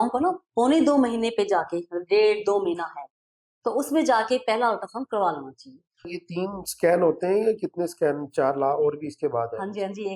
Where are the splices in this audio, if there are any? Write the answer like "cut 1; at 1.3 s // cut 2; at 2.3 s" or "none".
cut 1; at 6.2 s